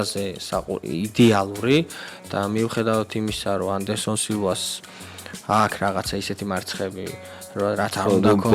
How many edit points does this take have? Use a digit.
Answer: 0